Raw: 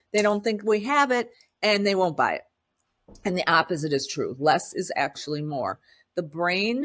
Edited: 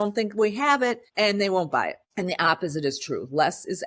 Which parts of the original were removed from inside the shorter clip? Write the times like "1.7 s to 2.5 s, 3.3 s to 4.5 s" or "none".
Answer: 1.3 s to 1.5 s, 2.5 s to 3.1 s